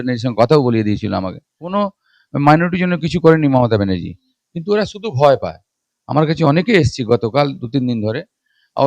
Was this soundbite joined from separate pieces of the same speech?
yes; 1 cut; at 1.6 s

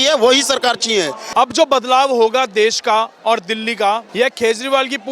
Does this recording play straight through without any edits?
no; 2 cuts; at 1.2 s, 4.1 s

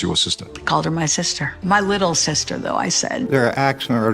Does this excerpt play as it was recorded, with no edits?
no; 1 cut; at 3.1 s

